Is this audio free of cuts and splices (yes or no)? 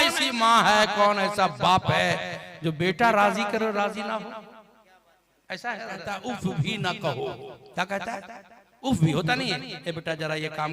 no